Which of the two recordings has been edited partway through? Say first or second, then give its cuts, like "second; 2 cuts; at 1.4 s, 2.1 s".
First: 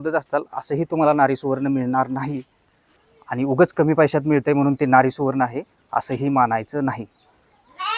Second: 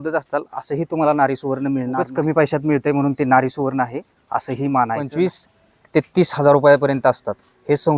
second; 2 cuts; at 2.1 s, 5.1 s